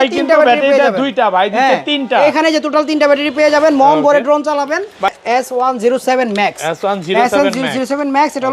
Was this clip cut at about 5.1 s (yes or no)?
yes